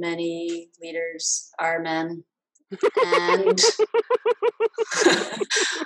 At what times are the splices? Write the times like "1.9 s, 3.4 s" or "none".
none